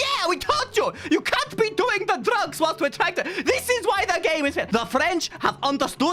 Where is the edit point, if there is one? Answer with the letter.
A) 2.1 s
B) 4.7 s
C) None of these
B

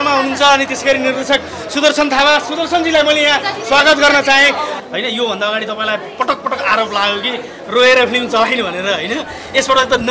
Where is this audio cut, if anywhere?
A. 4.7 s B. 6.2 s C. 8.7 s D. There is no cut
A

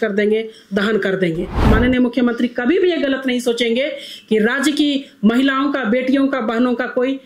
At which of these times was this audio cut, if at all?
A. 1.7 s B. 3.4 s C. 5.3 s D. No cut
A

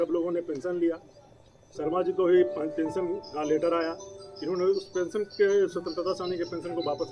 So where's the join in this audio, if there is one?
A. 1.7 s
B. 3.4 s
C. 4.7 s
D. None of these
D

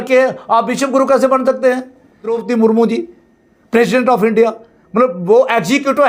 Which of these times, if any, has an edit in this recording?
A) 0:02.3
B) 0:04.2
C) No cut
A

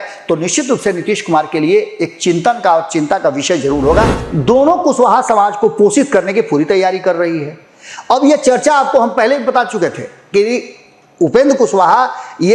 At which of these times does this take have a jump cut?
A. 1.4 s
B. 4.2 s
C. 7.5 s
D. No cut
B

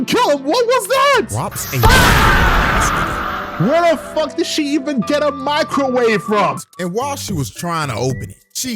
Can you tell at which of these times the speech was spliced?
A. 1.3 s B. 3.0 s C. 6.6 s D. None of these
C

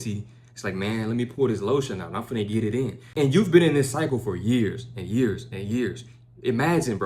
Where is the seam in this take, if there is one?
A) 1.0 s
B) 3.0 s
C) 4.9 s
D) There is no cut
B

